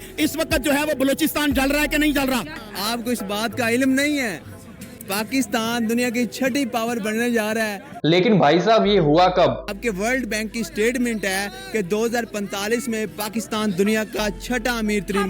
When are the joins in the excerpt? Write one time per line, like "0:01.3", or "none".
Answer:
0:02.7
0:09.7